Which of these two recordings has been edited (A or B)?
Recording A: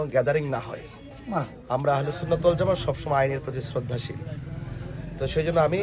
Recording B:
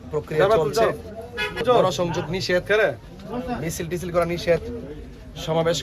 B